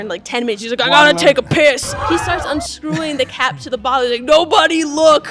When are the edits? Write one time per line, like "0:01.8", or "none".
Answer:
0:01.9